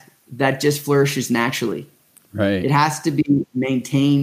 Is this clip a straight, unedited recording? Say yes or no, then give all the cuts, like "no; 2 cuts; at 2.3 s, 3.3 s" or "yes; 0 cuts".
yes; 0 cuts